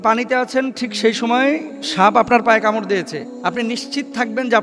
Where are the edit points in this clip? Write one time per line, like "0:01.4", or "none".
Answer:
0:03.2